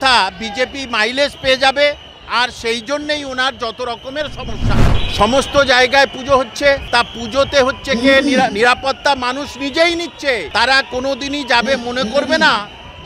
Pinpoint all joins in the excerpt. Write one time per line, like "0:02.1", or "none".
0:05.0
0:06.8
0:10.5